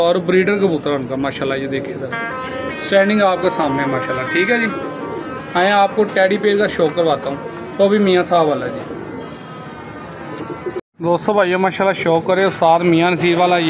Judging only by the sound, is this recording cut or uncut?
uncut